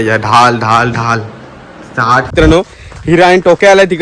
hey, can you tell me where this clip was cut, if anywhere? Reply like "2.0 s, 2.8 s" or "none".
2.3 s